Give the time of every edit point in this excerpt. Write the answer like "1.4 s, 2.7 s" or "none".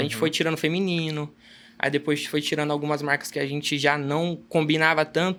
none